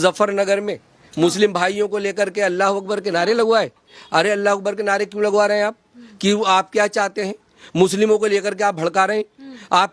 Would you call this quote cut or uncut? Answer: uncut